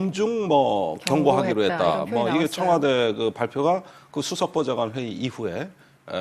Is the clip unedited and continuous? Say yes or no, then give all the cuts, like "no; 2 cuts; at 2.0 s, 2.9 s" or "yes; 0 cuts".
no; 1 cut; at 4.1 s